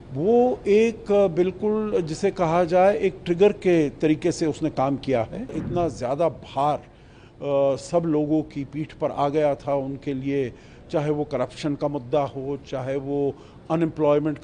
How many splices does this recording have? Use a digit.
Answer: 1